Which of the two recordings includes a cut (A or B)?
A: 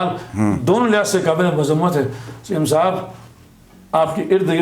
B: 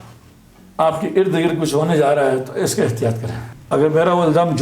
B